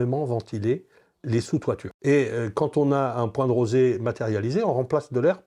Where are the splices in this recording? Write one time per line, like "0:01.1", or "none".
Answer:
0:01.9